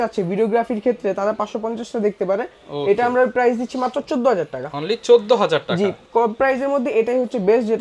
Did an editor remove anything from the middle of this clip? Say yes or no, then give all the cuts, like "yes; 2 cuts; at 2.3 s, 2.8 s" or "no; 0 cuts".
no; 0 cuts